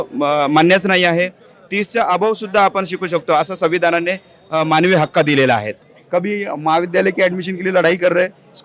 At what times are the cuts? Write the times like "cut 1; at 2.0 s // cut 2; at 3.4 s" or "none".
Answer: cut 1; at 5.7 s